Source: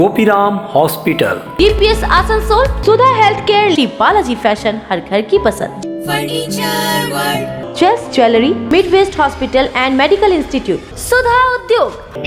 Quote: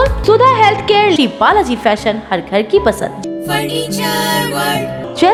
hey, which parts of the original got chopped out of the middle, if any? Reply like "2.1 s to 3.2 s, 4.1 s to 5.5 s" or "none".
none